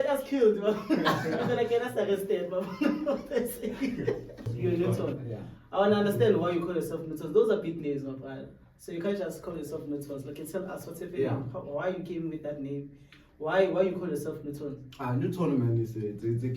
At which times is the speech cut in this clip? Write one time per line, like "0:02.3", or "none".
0:04.5